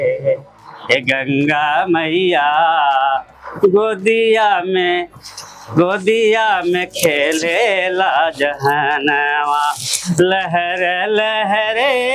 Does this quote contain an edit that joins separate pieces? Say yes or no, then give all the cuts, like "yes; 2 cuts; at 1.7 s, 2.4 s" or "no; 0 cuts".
no; 0 cuts